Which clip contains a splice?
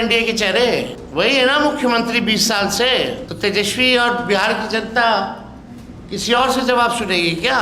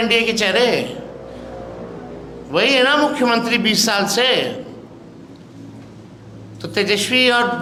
first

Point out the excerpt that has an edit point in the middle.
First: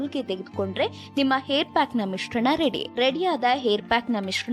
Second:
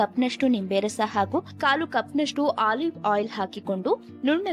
first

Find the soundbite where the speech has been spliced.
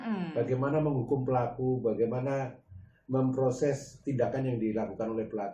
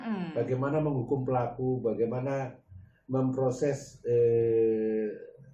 first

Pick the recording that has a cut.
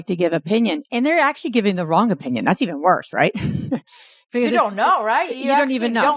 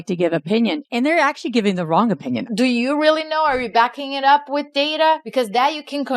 second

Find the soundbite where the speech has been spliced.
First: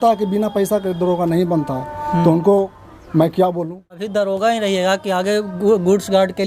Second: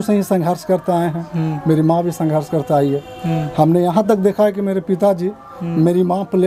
first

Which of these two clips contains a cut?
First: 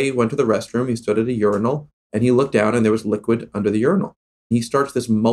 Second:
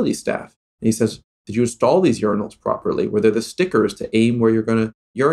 first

